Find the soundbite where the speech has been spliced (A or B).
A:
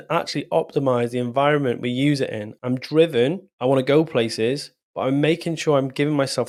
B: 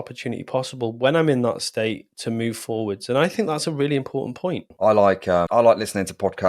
B